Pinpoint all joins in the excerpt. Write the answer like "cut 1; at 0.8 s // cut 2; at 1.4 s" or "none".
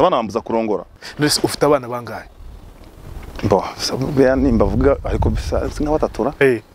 cut 1; at 1.0 s